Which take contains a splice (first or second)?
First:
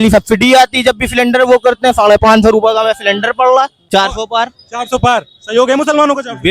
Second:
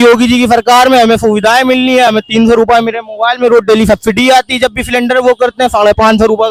first